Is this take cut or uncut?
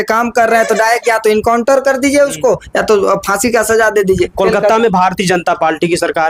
uncut